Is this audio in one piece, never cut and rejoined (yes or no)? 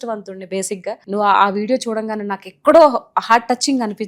no